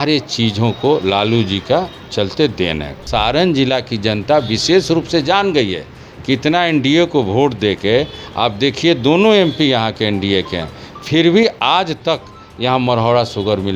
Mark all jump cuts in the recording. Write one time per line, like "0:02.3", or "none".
0:03.0

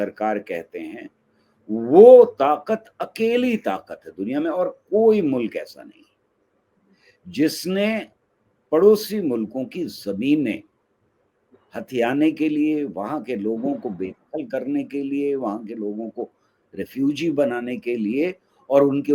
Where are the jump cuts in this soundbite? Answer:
none

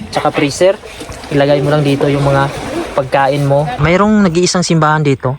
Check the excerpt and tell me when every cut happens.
0:03.7

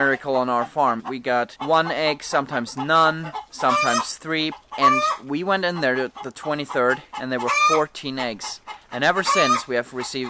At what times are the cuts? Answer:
0:01.1
0:04.5

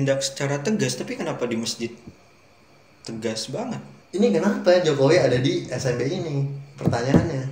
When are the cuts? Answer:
0:03.9

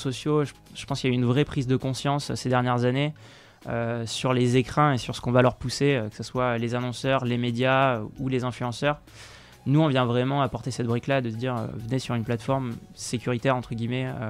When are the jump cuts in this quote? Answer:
none

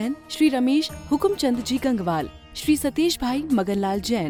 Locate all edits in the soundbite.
none

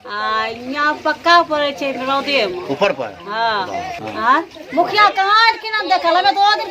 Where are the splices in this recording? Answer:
0:04.0

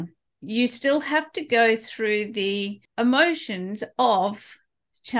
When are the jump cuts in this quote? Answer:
0:02.8

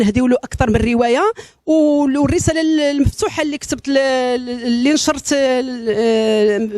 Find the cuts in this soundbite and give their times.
0:03.3

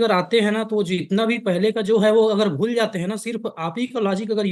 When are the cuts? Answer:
none

